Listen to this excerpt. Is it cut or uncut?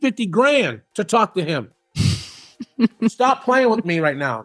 uncut